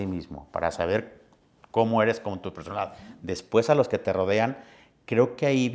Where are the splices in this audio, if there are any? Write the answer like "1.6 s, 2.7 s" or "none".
none